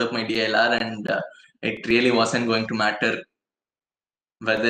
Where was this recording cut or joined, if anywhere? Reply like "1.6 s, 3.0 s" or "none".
none